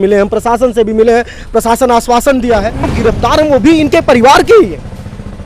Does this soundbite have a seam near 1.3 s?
no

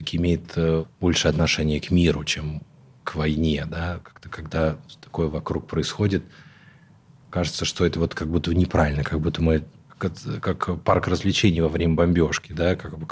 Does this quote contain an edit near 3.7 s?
no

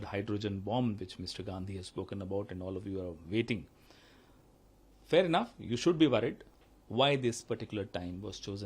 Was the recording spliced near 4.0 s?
no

